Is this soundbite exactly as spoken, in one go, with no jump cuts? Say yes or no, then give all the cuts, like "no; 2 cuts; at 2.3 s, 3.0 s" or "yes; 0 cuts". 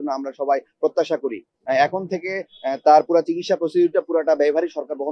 no; 1 cut; at 1.5 s